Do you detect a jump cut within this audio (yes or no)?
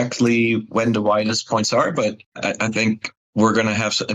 no